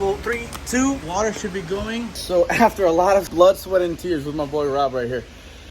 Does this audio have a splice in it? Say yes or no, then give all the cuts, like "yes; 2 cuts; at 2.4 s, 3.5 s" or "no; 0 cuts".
yes; 3 cuts; at 1.0 s, 2.2 s, 3.3 s